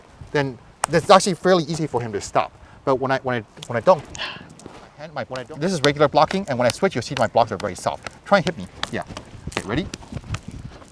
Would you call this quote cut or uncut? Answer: cut